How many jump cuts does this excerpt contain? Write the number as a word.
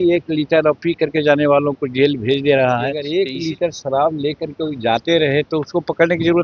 one